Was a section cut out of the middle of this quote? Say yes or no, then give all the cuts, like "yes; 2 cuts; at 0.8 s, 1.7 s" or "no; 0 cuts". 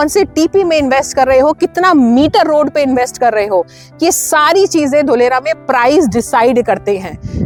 no; 0 cuts